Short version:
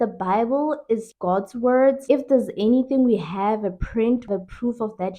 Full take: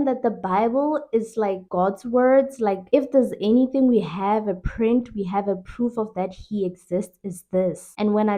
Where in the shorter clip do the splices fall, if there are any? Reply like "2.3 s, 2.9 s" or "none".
1.1 s, 2.0 s, 4.3 s